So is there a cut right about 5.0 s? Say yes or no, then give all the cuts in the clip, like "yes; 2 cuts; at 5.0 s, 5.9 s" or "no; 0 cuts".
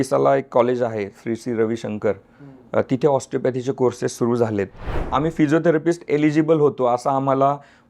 yes; 1 cut; at 5.0 s